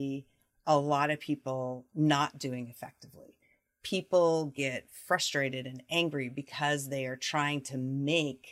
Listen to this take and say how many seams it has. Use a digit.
0